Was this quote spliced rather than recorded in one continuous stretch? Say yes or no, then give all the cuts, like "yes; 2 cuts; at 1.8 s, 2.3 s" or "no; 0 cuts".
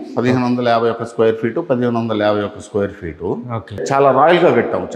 yes; 1 cut; at 3.8 s